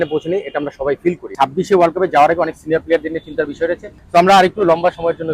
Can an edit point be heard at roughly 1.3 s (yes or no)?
yes